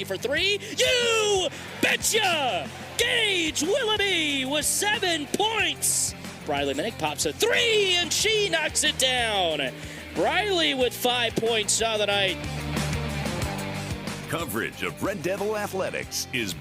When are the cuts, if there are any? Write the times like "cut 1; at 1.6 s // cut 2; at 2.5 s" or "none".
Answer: none